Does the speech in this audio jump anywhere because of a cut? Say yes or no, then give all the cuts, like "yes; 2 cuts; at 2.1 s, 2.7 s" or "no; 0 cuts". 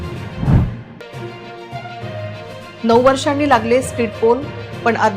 yes; 2 cuts; at 1.0 s, 2.7 s